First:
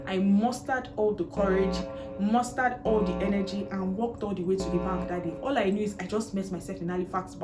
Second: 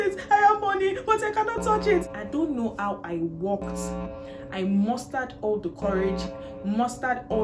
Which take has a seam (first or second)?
second